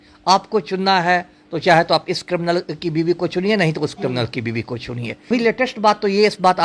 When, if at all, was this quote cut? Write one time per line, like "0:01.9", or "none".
0:05.3